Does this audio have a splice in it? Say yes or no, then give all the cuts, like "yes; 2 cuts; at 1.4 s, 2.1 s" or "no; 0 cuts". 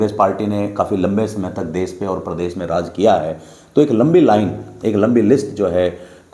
no; 0 cuts